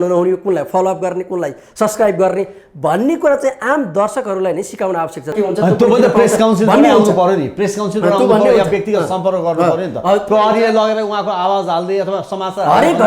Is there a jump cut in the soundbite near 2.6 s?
no; 1 cut; at 5.3 s

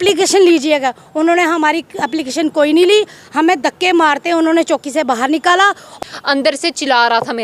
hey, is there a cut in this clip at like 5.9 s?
yes; 1 cut; at 5.9 s

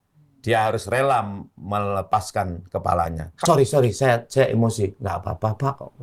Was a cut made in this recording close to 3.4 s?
yes; 1 cut; at 3.4 s

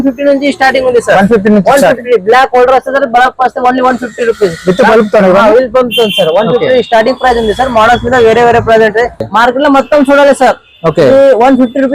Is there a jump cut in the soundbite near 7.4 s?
no; 1 cut; at 9.3 s

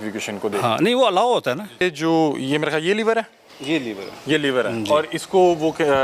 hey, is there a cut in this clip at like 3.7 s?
no; 1 cut; at 1.8 s

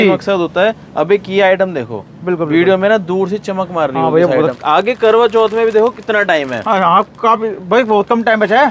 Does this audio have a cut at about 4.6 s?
yes; 1 cut; at 4.6 s

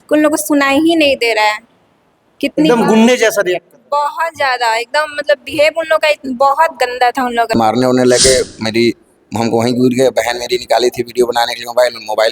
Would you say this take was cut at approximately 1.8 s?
no; 1 cut; at 7.5 s

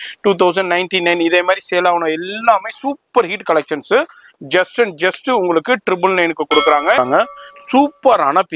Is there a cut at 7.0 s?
yes; 1 cut; at 7.0 s

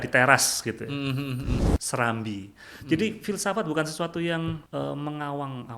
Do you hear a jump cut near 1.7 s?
yes; 2 cuts; at 1.7 s, 4.6 s

